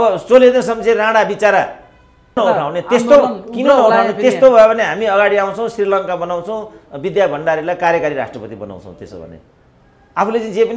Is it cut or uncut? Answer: cut